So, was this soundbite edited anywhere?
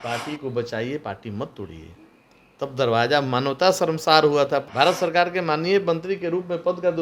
yes; 1 cut; at 4.7 s

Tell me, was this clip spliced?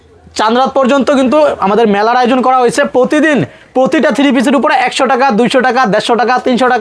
no; 0 cuts

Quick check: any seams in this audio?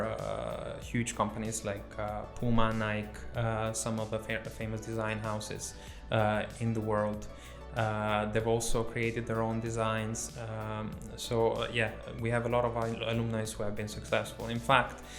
no; 0 cuts

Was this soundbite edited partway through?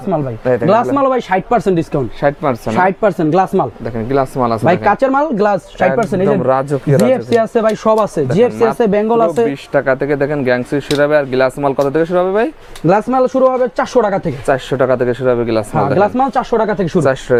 no; 0 cuts

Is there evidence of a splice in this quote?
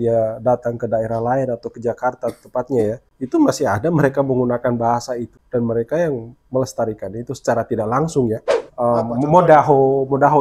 yes; 3 cuts; at 3.1 s, 5.3 s, 8.6 s

